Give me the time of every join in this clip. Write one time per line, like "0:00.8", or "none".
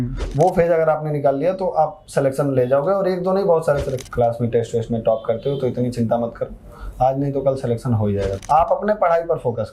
0:03.9
0:08.4